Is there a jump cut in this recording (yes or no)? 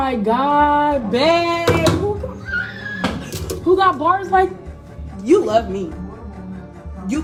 no